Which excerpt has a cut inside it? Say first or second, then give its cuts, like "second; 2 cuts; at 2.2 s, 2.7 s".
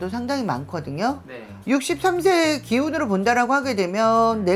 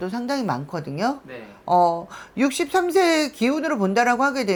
first; 1 cut; at 1.5 s